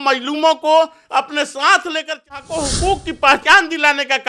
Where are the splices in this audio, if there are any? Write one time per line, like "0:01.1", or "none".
0:02.4